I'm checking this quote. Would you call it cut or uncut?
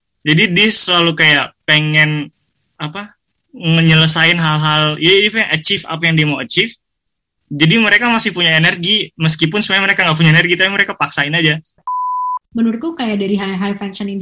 cut